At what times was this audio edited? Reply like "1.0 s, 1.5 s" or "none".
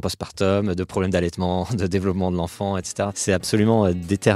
3.2 s